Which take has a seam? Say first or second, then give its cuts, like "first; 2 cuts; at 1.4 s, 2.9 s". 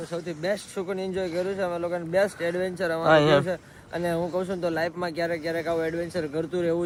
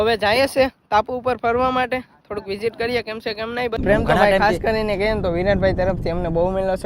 second; 1 cut; at 3.8 s